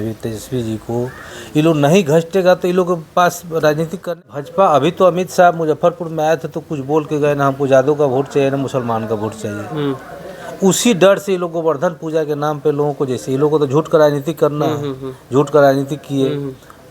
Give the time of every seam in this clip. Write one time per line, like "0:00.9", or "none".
0:04.2